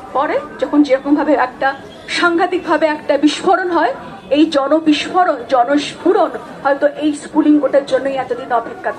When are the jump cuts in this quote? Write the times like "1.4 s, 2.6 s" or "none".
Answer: none